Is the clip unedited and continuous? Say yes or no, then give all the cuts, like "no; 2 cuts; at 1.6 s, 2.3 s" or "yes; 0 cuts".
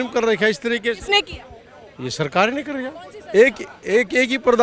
yes; 0 cuts